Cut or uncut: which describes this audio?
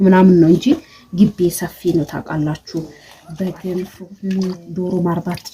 cut